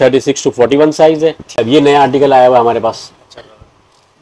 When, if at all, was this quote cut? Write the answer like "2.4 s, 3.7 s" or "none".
1.6 s